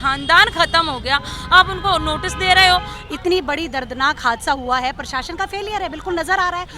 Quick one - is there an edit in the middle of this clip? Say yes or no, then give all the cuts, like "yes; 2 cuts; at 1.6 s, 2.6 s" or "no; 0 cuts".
yes; 1 cut; at 2.9 s